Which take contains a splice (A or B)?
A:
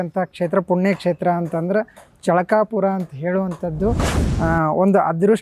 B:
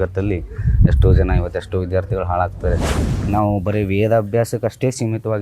B